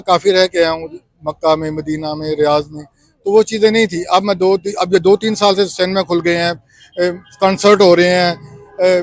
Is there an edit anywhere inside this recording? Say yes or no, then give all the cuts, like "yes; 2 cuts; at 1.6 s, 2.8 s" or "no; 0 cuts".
no; 0 cuts